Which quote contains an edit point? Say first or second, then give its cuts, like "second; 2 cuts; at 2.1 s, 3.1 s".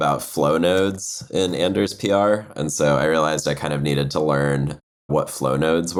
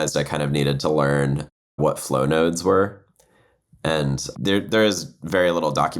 second; 1 cut; at 4.3 s